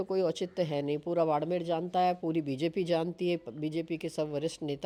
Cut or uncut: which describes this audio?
uncut